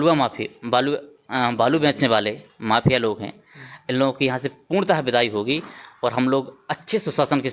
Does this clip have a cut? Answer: no; 0 cuts

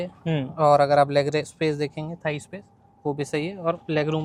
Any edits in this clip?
no; 0 cuts

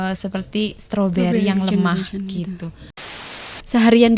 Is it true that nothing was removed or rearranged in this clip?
no; 1 cut; at 3.3 s

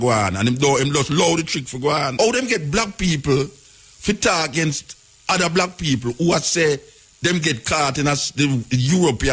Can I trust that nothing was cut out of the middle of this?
no; 1 cut; at 2.1 s

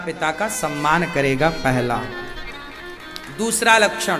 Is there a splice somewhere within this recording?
no; 0 cuts

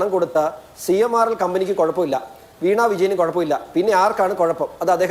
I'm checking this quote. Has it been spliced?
no; 0 cuts

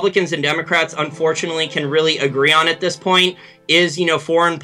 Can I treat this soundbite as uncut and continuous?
yes; 0 cuts

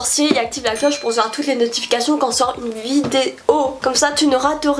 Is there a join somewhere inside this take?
yes; 1 cut; at 3.8 s

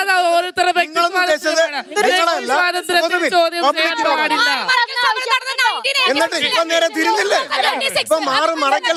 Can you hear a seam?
no; 0 cuts

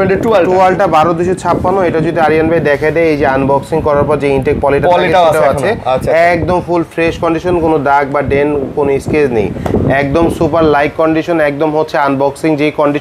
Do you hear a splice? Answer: no; 0 cuts

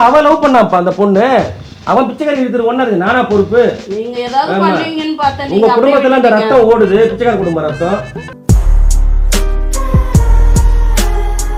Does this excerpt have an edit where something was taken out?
no; 0 cuts

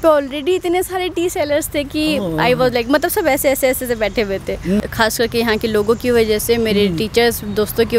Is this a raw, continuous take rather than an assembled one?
no; 1 cut; at 4.9 s

